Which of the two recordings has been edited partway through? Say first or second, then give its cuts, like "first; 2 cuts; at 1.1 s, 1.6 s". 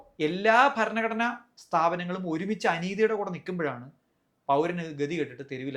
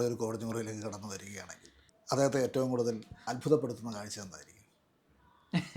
second; 1 cut; at 3.2 s